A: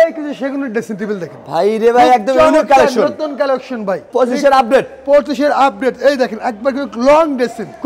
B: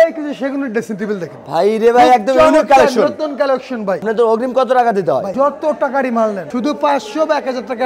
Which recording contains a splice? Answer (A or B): B